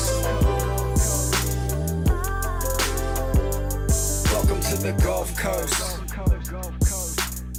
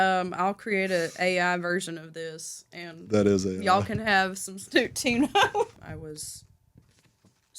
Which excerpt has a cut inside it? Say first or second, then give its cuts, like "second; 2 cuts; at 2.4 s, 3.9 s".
second; 1 cut; at 5.8 s